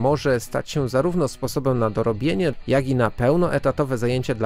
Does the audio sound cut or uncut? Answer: cut